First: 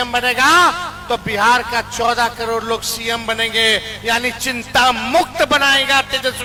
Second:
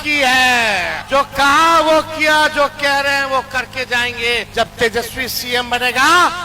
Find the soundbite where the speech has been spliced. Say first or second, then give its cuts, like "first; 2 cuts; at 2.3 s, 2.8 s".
second; 2 cuts; at 1.0 s, 4.5 s